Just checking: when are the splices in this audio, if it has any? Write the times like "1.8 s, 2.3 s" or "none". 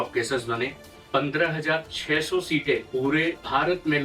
0.9 s